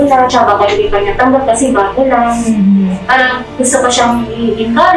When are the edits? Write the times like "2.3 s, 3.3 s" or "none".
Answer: none

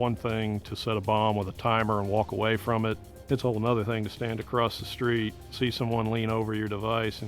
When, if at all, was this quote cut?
3.1 s

